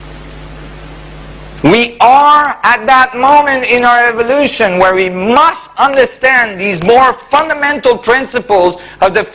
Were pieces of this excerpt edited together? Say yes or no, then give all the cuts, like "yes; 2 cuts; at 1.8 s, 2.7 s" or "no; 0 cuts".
no; 0 cuts